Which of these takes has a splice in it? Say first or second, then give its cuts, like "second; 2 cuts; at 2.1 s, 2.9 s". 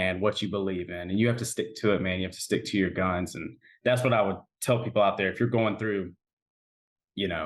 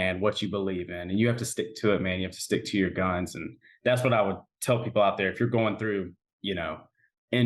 second; 1 cut; at 6.2 s